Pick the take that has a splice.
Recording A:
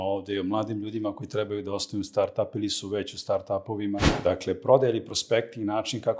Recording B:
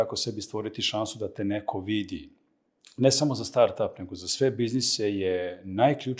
A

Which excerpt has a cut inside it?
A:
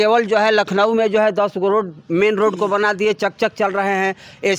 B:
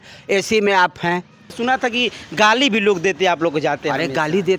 B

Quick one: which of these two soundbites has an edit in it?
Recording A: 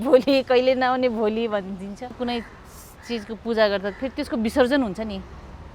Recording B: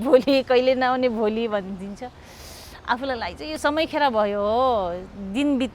A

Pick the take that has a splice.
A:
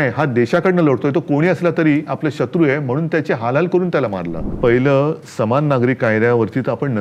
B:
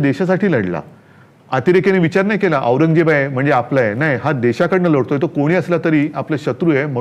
A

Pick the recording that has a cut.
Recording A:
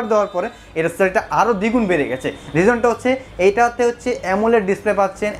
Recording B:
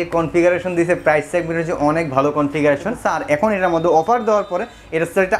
B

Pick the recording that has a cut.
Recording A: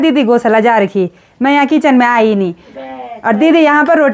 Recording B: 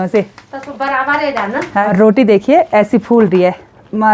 B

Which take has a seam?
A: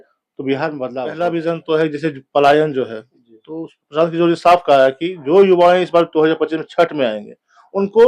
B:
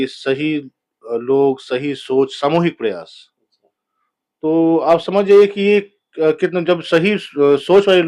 A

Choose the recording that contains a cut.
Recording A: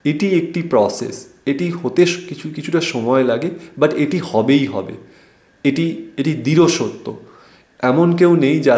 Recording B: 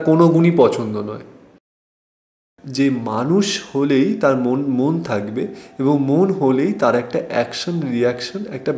B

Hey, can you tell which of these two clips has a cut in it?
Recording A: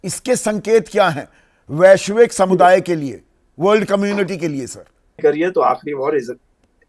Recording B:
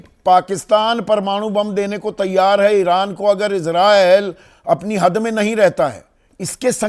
A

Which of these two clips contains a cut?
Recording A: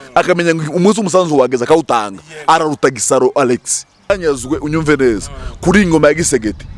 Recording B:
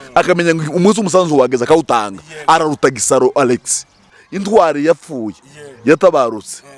A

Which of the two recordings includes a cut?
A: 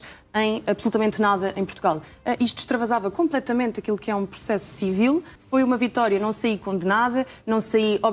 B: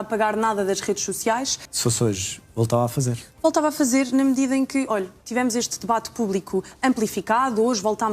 B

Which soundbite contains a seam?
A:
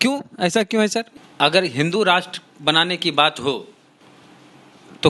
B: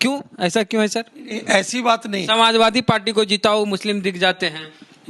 A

